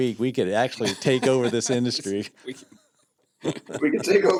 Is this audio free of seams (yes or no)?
yes